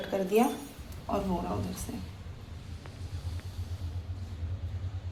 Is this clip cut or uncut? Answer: uncut